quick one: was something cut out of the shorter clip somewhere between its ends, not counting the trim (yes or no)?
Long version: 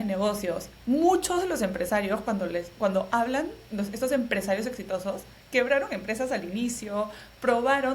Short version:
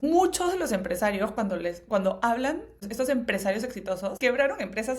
yes